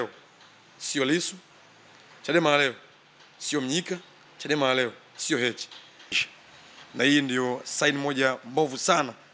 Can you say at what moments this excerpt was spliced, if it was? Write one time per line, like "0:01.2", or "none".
0:06.2